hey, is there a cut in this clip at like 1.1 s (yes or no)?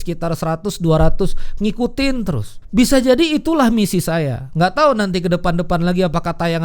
no